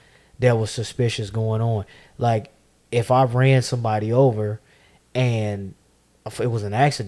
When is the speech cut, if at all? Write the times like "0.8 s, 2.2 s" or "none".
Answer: none